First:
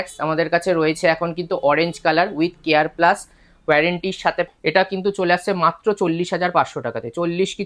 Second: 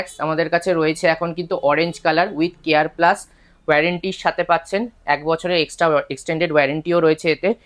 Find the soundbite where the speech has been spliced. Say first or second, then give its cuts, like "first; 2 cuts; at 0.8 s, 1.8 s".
first; 1 cut; at 4.5 s